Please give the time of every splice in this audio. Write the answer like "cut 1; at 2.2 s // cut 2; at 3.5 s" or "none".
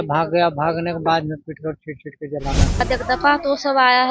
cut 1; at 2.8 s